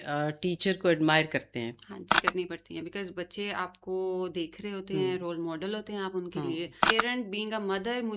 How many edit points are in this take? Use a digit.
2